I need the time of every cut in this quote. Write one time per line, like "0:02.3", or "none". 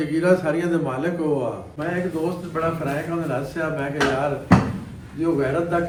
none